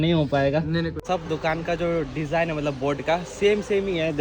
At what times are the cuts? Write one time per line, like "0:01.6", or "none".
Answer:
0:01.0